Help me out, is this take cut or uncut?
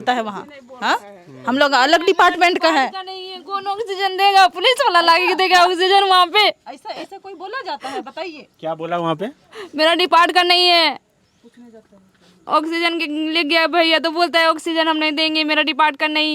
uncut